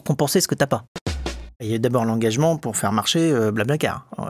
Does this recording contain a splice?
yes; 1 cut; at 1.2 s

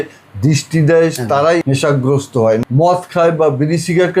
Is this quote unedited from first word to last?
no; 2 cuts; at 1.6 s, 2.6 s

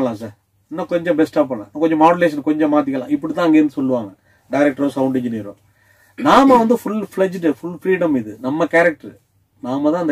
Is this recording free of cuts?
yes; 0 cuts

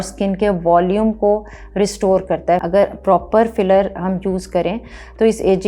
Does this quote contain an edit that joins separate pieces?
yes; 1 cut; at 2.6 s

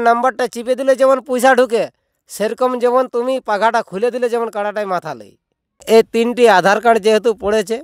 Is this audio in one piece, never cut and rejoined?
no; 1 cut; at 5.8 s

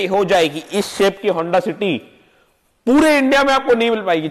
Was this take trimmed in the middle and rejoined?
no; 0 cuts

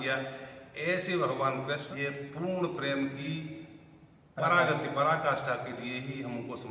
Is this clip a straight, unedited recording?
no; 1 cut; at 1.8 s

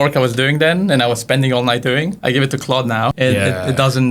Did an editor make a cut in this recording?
yes; 2 cuts; at 2.2 s, 3.1 s

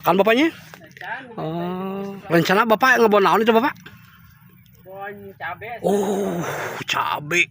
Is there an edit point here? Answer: yes; 1 cut; at 2.2 s

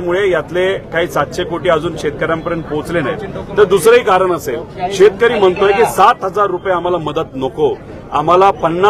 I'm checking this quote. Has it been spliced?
no; 0 cuts

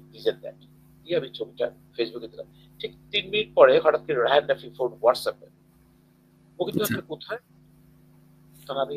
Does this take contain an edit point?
no; 0 cuts

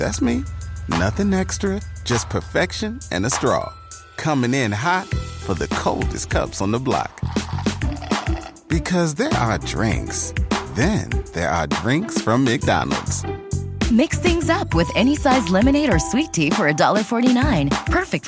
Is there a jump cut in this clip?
no; 0 cuts

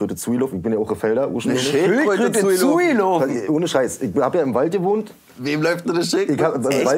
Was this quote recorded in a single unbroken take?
yes; 0 cuts

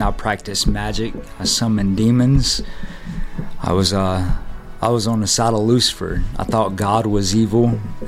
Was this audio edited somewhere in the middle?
no; 0 cuts

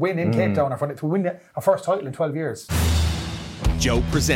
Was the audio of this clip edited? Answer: yes; 1 cut; at 2.6 s

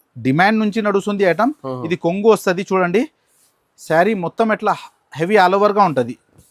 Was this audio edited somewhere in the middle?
no; 0 cuts

